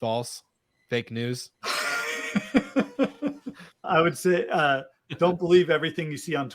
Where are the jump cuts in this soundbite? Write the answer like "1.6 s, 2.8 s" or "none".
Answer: 1.5 s, 3.8 s